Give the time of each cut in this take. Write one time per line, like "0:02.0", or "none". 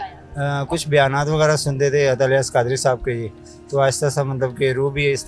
none